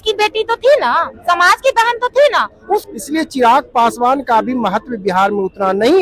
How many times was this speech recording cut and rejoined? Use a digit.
1